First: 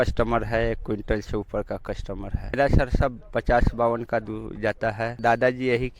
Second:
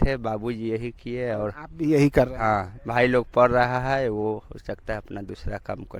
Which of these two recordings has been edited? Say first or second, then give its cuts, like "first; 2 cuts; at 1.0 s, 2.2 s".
first; 2 cuts; at 2.6 s, 5.1 s